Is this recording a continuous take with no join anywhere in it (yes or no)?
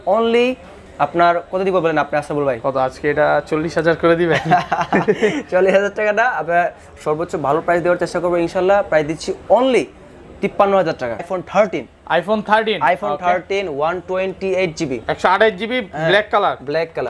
no